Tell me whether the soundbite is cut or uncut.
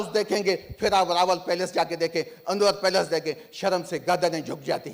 uncut